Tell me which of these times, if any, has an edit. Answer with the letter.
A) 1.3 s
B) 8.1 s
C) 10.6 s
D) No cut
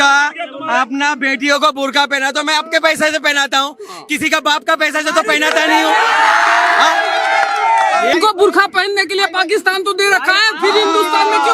B